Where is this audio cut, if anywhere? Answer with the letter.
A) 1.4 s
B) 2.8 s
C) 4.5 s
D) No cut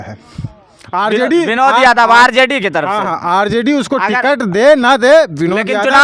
D